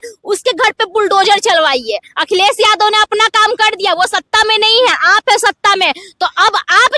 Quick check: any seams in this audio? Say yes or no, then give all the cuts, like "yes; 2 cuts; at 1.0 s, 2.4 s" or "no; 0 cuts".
no; 0 cuts